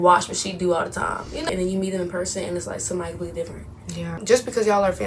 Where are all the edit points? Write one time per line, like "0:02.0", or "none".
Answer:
0:01.5
0:04.2